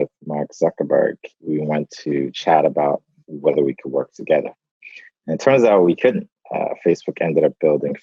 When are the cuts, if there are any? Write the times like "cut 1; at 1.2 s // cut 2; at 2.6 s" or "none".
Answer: none